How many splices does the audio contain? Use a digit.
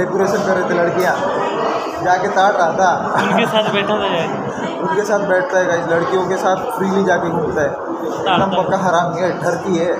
0